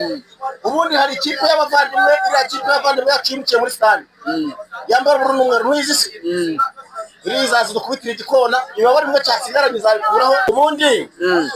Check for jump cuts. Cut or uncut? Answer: cut